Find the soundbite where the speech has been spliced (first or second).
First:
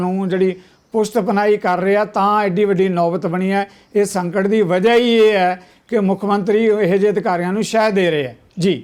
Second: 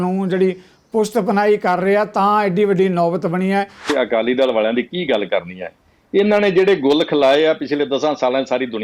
second